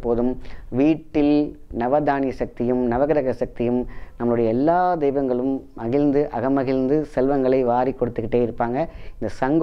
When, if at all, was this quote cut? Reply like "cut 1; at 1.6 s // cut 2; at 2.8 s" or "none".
none